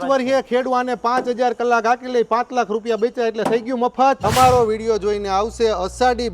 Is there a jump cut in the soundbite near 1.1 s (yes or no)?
no